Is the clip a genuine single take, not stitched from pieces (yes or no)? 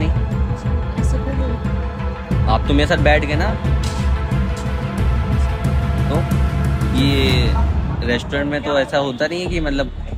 yes